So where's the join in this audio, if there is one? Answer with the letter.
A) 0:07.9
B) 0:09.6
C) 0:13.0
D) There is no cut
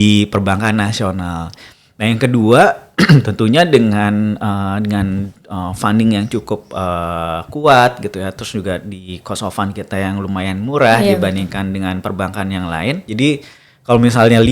C